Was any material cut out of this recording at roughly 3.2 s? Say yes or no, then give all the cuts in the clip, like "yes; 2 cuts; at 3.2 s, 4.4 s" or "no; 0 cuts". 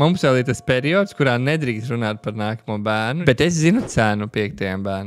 yes; 1 cut; at 3.2 s